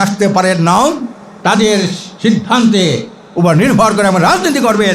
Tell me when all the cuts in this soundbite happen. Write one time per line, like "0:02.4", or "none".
none